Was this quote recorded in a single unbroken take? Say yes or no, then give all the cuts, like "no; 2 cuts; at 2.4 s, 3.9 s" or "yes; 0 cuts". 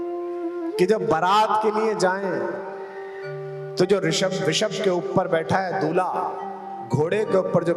yes; 0 cuts